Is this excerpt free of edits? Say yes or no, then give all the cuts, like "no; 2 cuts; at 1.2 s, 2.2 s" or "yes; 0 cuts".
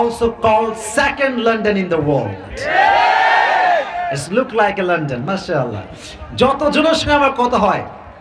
yes; 0 cuts